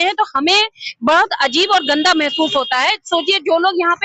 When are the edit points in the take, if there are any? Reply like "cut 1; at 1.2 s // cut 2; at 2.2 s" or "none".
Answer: none